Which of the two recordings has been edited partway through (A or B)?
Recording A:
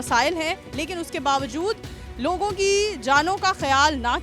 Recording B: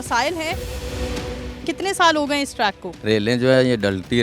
B